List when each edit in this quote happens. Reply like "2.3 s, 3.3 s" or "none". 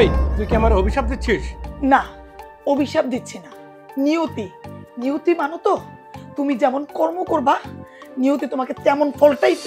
none